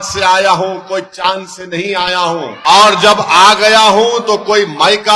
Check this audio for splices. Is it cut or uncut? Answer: cut